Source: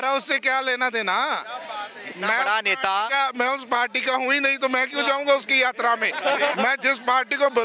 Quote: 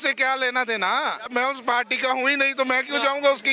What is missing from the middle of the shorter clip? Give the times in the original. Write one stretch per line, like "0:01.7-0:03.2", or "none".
0:01.5-0:03.3